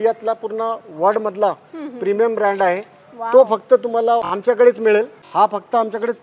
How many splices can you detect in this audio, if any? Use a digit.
2